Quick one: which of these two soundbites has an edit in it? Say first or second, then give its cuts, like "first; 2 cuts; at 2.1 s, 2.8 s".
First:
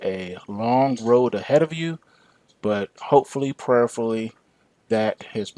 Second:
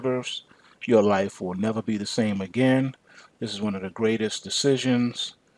first; 1 cut; at 1.8 s